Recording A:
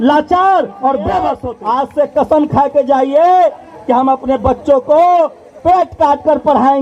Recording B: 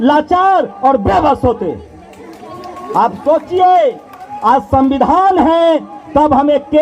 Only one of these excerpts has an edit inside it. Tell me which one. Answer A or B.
A